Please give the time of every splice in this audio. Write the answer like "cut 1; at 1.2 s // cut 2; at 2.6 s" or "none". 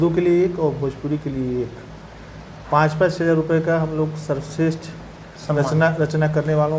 none